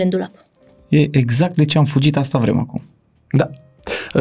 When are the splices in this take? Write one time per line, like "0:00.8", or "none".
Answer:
none